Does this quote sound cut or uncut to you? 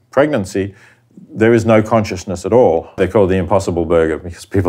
cut